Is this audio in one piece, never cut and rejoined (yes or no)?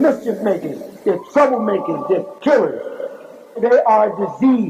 yes